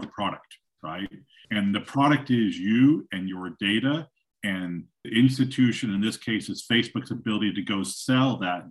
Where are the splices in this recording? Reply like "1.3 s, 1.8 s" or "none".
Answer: 1.3 s, 5.1 s